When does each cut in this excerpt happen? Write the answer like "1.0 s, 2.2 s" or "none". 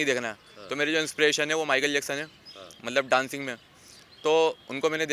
none